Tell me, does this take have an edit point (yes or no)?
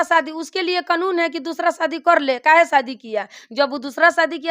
no